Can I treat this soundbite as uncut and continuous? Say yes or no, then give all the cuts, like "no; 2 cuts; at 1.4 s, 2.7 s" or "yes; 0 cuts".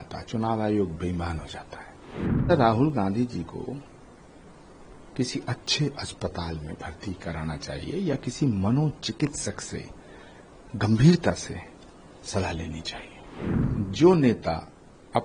no; 2 cuts; at 2.5 s, 13.6 s